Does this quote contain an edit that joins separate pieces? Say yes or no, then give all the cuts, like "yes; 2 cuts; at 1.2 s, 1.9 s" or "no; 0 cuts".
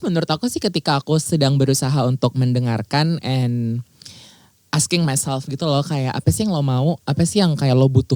no; 0 cuts